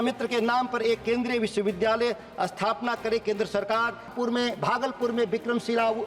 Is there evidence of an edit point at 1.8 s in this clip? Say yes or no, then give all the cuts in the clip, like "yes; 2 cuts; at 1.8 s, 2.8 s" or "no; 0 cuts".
no; 1 cut; at 4.1 s